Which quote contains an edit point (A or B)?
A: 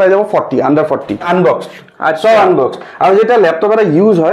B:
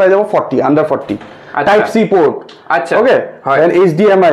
A